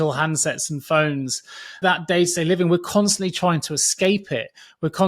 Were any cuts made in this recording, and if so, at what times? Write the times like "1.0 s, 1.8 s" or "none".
1.8 s